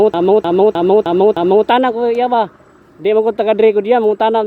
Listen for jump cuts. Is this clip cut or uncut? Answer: cut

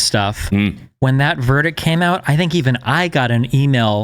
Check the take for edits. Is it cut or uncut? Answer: uncut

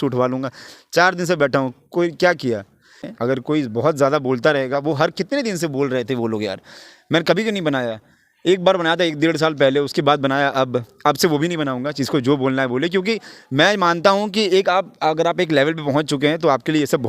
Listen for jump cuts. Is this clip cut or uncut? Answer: cut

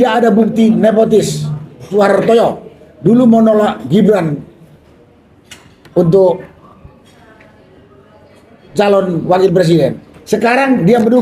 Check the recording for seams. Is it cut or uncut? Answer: cut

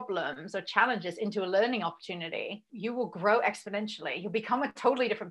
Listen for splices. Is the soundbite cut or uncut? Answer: cut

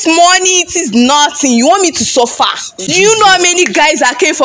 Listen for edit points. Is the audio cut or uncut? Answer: cut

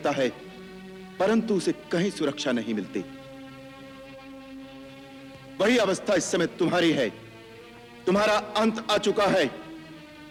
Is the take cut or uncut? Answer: uncut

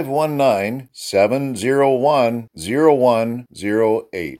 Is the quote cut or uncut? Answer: uncut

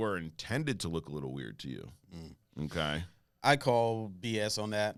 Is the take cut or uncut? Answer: uncut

